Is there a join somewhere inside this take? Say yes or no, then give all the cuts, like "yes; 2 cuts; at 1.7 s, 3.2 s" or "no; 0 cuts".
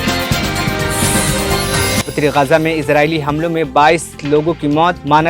yes; 1 cut; at 2.0 s